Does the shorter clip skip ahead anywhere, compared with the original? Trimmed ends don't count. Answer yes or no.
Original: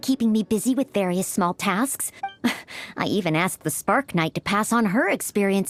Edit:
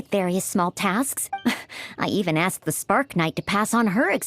yes